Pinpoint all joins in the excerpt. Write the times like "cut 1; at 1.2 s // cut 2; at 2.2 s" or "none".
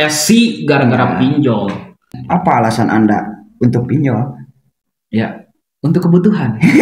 cut 1; at 2.2 s